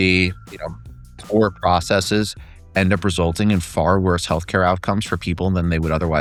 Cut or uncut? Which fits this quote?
uncut